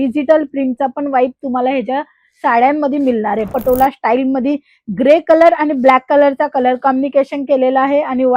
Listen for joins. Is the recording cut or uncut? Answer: cut